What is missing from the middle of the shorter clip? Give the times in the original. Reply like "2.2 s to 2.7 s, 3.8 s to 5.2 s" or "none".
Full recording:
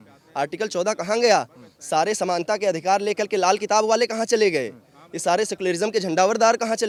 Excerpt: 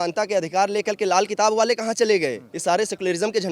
4.8 s to 5.1 s

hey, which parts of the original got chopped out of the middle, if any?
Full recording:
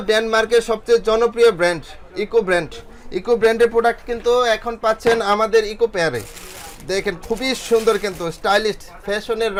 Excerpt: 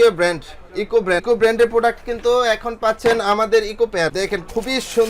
2.6 s to 3.2 s, 6.1 s to 6.9 s

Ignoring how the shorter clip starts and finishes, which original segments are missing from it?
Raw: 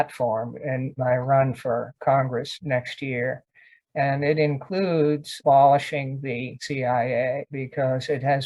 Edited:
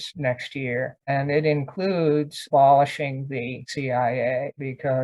3.6 s to 4.0 s

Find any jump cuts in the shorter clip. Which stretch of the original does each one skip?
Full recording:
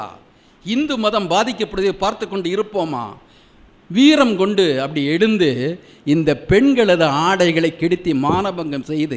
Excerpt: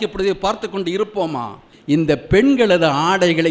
3.3 s to 5.9 s

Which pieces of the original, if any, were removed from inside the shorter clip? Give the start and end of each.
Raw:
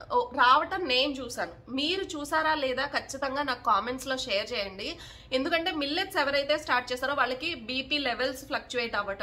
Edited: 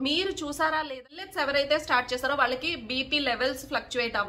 2.9 s to 6.0 s

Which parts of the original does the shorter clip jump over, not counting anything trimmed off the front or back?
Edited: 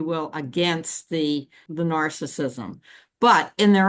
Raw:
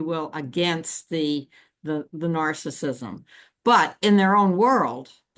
1.7 s to 2.1 s

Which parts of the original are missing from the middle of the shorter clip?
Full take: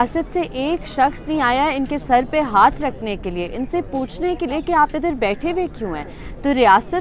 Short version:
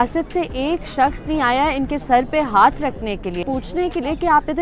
3.4 s to 3.9 s

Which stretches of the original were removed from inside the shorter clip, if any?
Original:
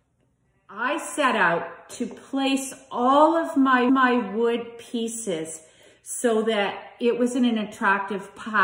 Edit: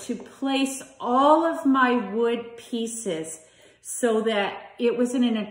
3.7 s to 4.0 s

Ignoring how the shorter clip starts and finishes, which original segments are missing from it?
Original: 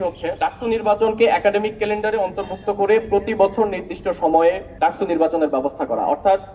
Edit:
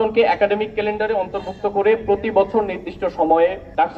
none

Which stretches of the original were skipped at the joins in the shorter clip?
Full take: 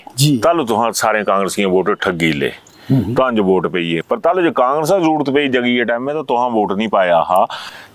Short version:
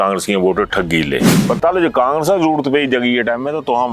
2.7 s to 4.0 s

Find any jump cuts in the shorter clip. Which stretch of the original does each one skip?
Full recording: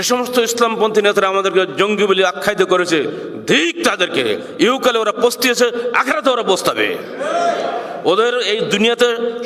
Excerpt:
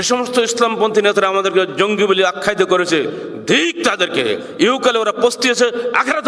none

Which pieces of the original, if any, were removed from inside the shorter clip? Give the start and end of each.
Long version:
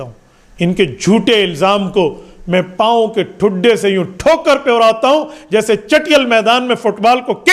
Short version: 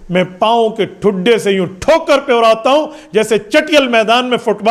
none

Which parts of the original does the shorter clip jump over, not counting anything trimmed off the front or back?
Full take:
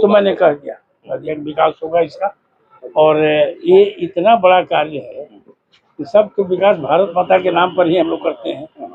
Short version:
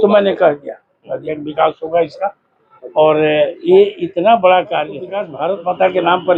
5.3 s to 6.8 s

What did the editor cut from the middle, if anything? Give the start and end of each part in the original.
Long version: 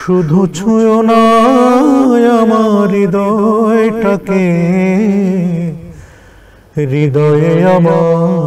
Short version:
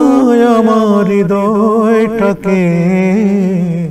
none

